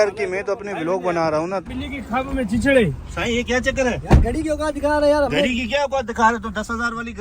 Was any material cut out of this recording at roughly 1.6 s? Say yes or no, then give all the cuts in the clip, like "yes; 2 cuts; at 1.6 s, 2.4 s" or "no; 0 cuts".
yes; 1 cut; at 1.6 s